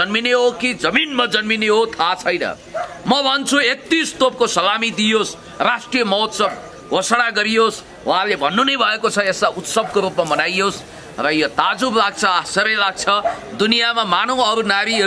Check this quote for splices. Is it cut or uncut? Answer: uncut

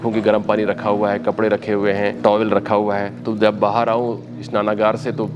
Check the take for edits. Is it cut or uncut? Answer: cut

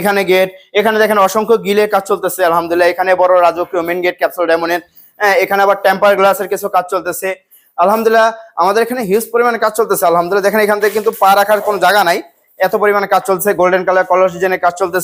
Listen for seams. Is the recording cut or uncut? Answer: uncut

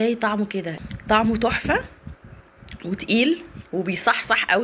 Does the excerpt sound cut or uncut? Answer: uncut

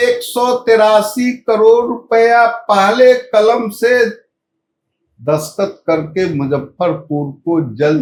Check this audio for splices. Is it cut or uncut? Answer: uncut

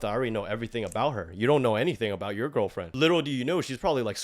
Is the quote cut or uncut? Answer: cut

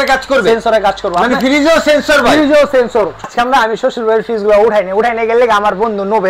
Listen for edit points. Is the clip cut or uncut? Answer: cut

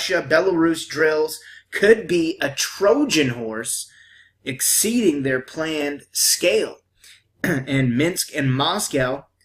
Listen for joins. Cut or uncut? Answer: cut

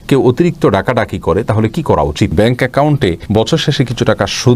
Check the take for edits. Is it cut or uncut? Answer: cut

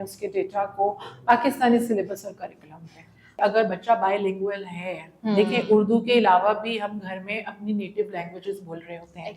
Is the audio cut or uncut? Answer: cut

